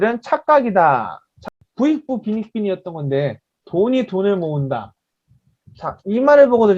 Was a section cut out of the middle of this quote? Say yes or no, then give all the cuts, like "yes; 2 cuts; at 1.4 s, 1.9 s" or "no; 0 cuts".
yes; 1 cut; at 1.5 s